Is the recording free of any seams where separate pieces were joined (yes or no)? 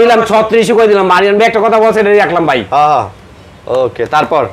yes